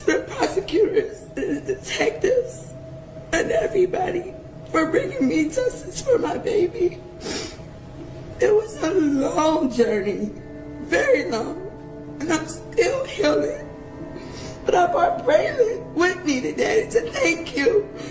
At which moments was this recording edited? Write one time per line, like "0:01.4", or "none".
none